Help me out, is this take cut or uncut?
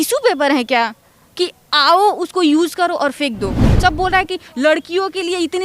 cut